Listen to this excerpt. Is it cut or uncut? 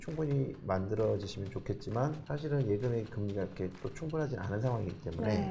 cut